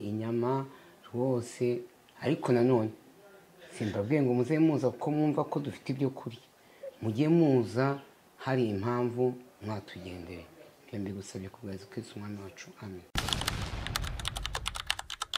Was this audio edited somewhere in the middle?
yes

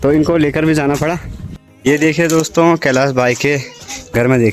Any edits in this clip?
yes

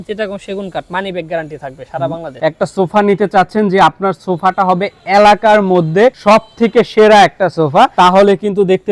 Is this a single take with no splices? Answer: no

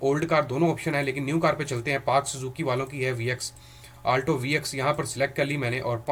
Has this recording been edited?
no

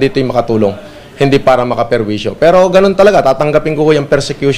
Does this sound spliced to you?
no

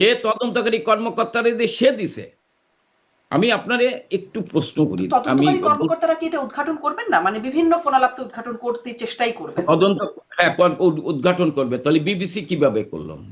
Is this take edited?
no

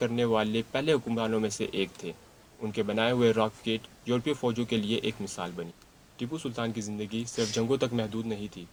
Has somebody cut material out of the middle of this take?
no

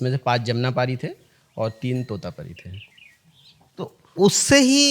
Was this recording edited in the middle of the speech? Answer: no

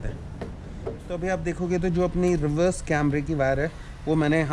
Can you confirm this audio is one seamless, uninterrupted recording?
no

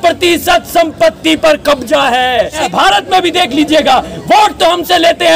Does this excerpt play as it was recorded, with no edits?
no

